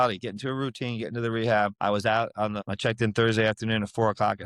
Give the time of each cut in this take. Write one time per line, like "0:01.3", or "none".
0:01.8
0:02.6